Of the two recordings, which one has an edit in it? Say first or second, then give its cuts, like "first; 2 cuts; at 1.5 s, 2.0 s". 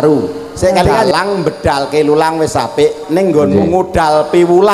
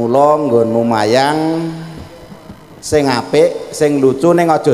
first; 1 cut; at 1.1 s